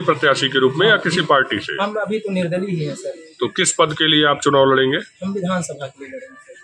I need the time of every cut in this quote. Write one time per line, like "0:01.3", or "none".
none